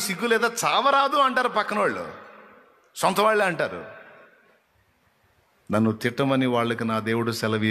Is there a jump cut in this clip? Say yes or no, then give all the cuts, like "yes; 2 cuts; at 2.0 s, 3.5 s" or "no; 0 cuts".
no; 0 cuts